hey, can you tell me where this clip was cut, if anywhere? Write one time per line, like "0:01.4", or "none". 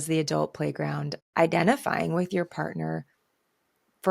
0:01.2